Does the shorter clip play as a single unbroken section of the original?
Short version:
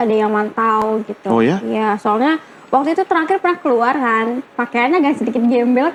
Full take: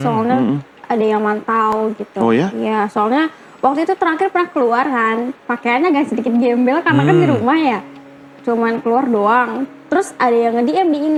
yes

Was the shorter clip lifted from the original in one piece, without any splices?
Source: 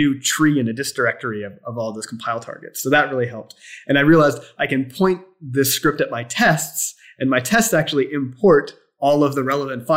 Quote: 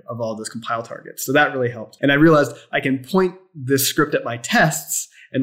no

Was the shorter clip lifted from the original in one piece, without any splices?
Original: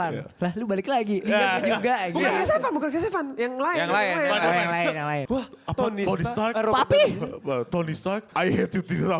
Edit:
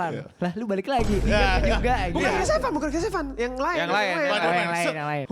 yes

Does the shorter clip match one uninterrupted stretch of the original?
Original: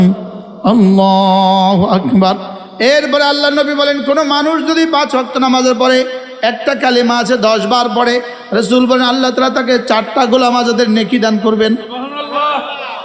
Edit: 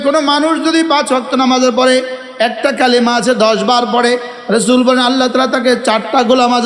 yes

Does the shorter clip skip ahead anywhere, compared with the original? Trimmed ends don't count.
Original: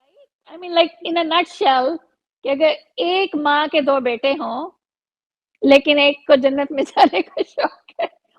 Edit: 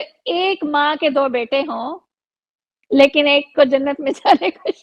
no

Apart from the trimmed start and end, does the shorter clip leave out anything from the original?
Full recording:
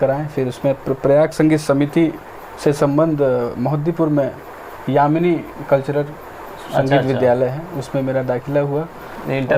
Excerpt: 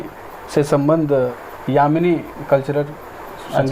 yes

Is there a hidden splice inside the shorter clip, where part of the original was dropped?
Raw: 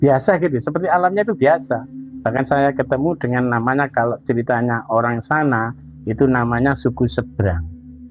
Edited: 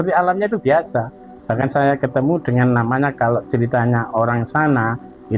no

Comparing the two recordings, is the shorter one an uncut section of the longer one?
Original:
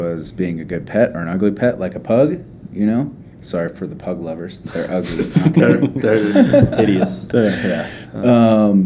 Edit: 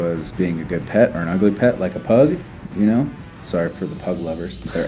yes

